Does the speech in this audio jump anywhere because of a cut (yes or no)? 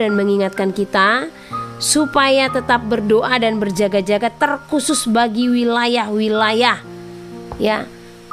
no